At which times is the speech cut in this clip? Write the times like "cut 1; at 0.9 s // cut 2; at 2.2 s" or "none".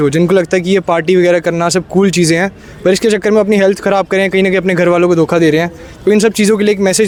none

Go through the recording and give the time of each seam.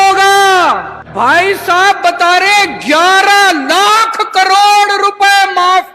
cut 1; at 1.0 s

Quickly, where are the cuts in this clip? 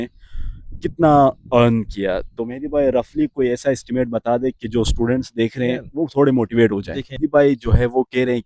cut 1; at 7.1 s

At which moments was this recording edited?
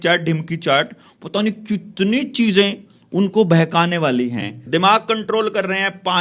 cut 1; at 4.6 s

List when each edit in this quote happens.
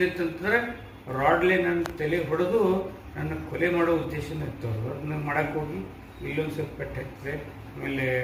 none

